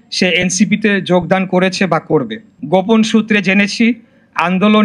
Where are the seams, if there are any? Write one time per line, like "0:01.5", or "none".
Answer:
0:02.6